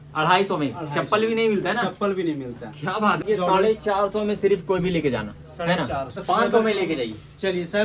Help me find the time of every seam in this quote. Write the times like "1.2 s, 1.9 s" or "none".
3.2 s, 6.2 s